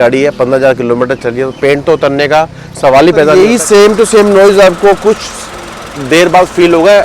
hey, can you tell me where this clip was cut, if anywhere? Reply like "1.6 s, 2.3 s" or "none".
3.3 s